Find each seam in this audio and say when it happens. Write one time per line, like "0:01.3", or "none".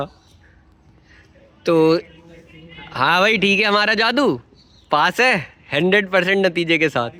none